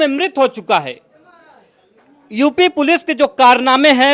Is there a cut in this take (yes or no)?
no